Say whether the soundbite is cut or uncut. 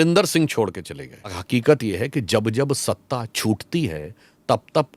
cut